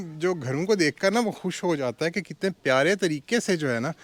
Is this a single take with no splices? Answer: yes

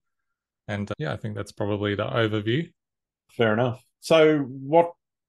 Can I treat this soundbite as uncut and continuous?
yes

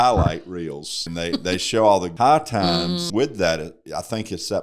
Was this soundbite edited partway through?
yes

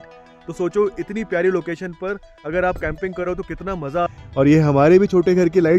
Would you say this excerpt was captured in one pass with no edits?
no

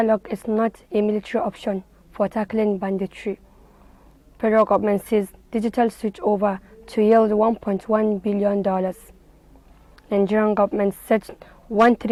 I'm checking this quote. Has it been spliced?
no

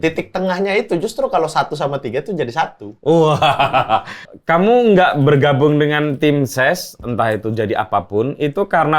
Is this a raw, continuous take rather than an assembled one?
no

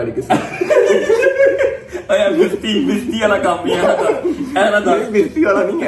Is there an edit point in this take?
no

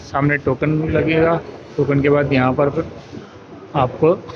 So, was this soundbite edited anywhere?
no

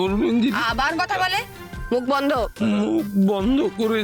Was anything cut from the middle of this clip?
no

